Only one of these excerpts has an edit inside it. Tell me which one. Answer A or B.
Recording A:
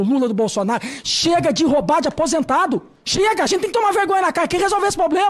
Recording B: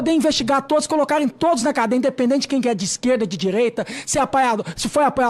A